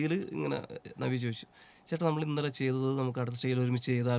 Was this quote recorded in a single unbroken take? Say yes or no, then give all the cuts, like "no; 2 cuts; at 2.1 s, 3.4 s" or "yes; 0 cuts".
yes; 0 cuts